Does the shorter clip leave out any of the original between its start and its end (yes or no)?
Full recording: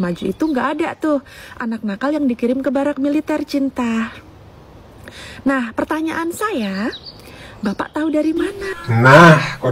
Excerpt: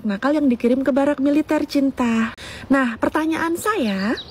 yes